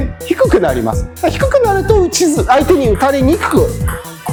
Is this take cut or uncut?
uncut